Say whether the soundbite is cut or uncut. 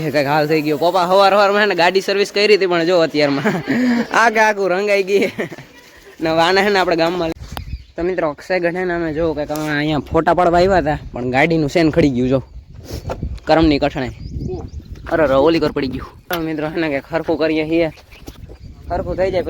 cut